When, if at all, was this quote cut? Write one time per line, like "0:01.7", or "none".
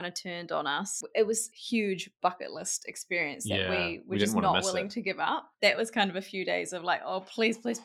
0:00.9
0:01.5
0:05.5